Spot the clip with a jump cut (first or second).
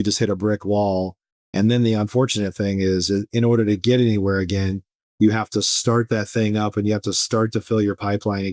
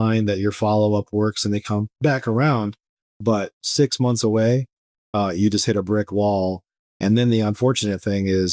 second